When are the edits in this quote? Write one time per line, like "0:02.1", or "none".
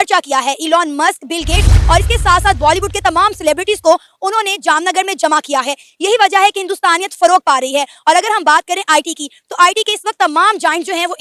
none